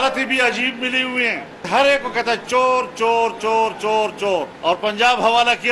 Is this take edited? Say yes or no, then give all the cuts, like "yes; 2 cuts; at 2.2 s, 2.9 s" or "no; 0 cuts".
yes; 1 cut; at 1.6 s